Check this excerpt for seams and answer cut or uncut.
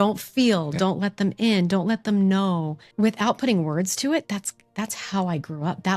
cut